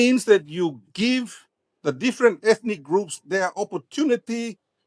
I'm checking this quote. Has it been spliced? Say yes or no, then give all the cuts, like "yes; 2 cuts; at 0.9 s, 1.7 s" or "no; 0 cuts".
no; 0 cuts